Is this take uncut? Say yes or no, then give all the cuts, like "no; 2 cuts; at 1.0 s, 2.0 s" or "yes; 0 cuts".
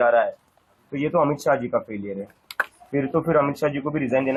yes; 0 cuts